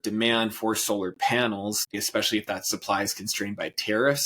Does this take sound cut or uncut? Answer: cut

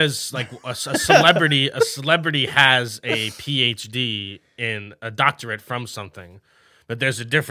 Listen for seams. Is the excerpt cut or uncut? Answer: uncut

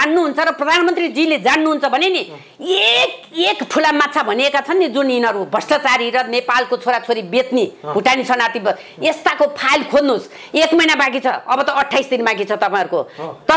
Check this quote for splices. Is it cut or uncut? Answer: uncut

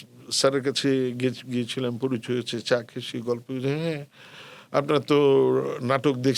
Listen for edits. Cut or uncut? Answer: uncut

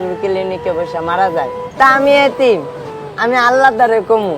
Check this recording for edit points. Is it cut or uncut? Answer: cut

